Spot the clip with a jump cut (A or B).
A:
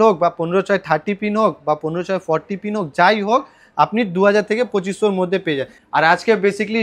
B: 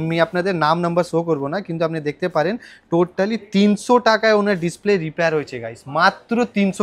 A